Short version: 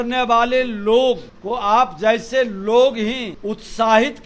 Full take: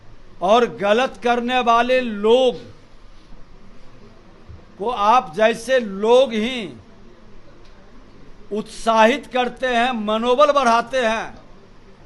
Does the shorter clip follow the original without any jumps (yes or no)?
no